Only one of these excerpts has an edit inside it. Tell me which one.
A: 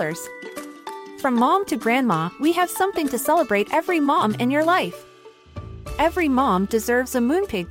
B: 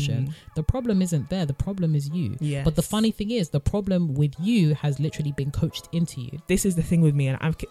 B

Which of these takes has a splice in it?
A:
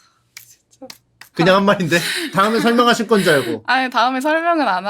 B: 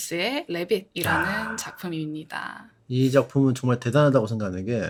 A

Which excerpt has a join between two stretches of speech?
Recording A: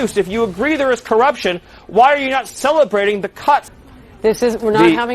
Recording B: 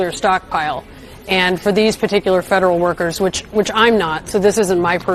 A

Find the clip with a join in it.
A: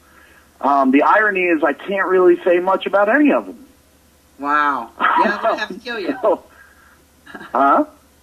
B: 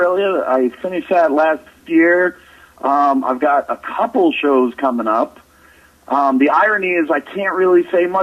B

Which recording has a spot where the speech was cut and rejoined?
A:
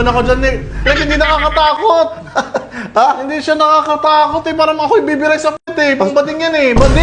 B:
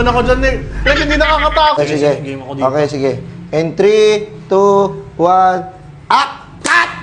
B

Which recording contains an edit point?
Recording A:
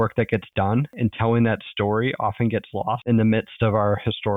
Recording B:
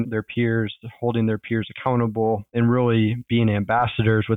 A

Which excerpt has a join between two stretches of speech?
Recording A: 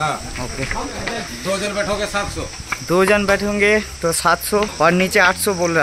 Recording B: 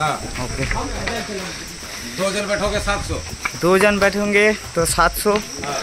A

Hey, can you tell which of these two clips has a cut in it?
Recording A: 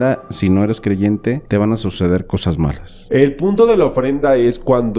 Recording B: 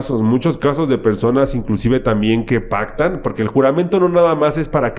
A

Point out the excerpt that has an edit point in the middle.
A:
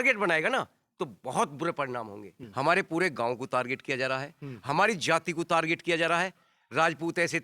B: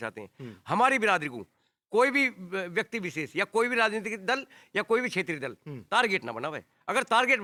A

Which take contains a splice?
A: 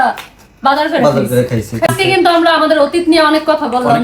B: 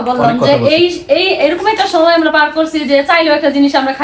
A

